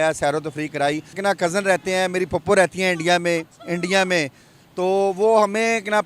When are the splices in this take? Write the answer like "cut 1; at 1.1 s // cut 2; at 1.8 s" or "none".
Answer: cut 1; at 1.2 s

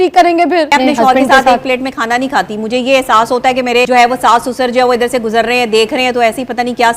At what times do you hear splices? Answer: cut 1; at 0.7 s // cut 2; at 3.9 s

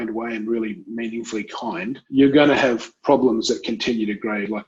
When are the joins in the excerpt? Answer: cut 1; at 2.0 s

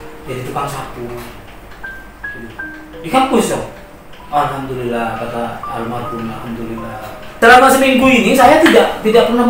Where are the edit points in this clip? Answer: cut 1; at 7.2 s

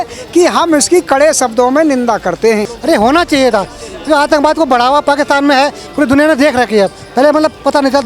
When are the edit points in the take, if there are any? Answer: cut 1; at 2.7 s

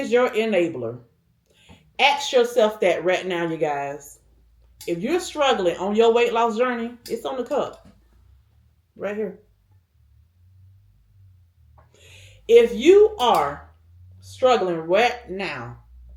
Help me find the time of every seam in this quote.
none

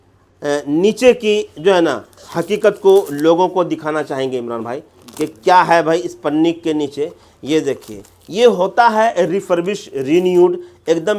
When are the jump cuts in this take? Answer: none

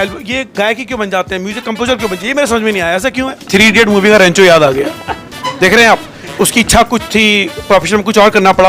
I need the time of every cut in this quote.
cut 1; at 3.4 s

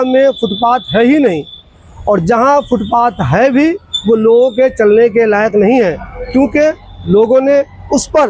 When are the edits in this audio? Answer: none

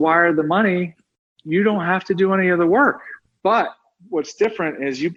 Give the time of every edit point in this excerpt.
none

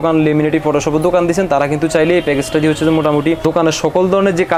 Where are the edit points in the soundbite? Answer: none

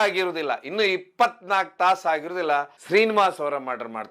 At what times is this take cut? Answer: cut 1; at 2.8 s

